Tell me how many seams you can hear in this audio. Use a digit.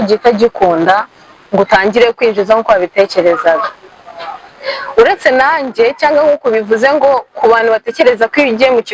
0